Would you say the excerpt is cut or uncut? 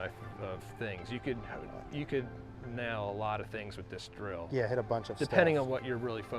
uncut